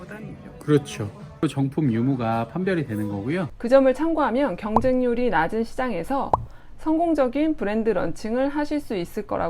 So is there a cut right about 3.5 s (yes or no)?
yes